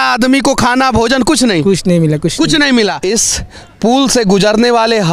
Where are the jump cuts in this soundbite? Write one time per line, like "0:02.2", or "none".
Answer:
0:03.0